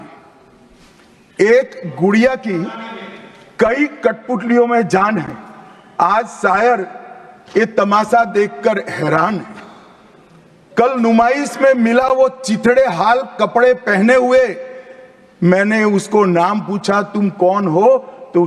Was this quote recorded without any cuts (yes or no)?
yes